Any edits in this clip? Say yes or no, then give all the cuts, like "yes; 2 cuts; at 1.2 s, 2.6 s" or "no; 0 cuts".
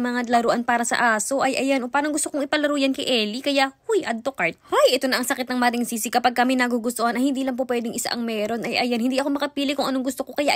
no; 0 cuts